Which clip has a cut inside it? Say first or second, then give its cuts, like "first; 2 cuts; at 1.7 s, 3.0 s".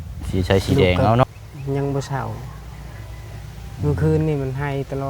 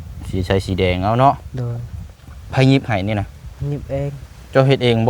first; 1 cut; at 1.2 s